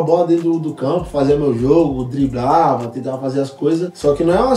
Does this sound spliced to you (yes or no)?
no